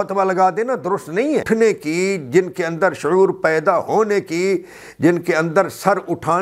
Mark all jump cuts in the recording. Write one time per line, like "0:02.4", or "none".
0:01.4